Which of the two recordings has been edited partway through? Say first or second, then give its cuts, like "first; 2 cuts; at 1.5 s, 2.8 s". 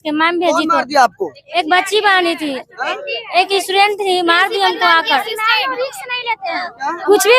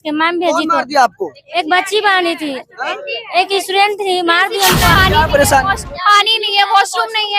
second; 1 cut; at 5.0 s